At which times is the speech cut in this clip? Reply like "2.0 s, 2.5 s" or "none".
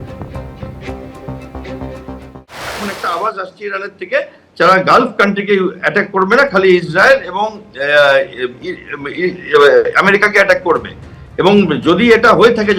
2.4 s